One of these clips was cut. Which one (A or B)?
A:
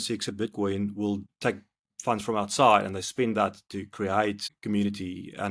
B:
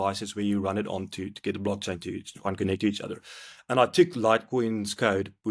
A